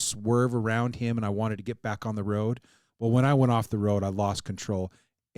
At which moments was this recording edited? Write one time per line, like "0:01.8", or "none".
none